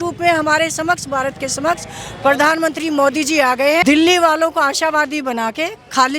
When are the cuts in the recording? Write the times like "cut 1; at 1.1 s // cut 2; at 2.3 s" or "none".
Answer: cut 1; at 3.8 s